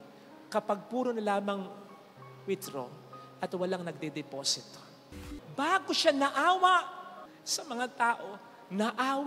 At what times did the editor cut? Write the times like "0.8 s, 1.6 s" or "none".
5.4 s